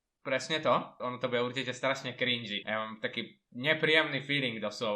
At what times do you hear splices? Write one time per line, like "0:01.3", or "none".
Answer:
0:01.0